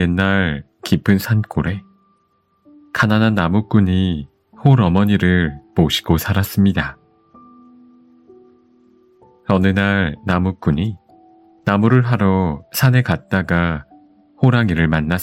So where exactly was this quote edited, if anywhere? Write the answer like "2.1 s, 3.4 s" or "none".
none